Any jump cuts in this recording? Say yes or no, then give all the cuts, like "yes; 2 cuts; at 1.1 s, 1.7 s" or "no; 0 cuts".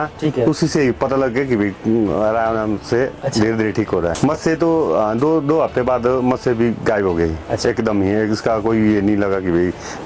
no; 0 cuts